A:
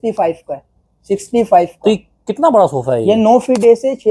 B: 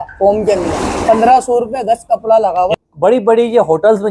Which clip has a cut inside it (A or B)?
B